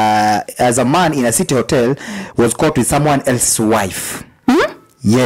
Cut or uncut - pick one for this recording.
uncut